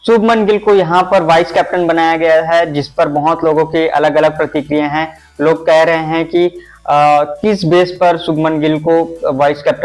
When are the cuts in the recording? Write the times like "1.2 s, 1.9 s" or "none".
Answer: none